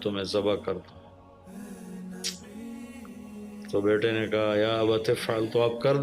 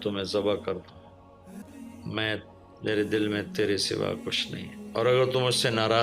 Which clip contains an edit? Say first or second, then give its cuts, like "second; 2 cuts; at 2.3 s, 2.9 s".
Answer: second; 1 cut; at 1.7 s